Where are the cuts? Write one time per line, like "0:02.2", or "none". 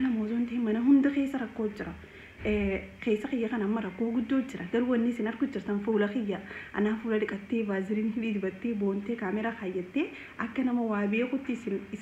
none